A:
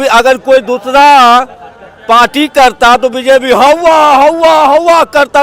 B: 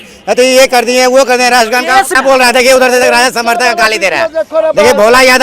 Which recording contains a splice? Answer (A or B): B